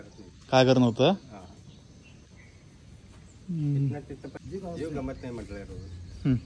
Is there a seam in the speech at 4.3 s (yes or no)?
yes